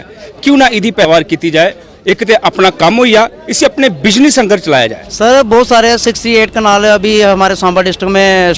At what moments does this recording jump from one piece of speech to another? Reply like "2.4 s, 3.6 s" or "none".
5.0 s

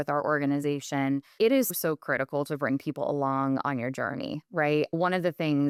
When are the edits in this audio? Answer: none

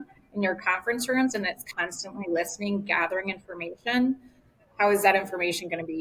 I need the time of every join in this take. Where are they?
none

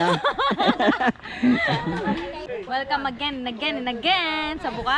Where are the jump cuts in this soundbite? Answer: 2.4 s

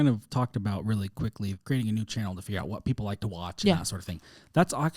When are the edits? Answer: 1.6 s

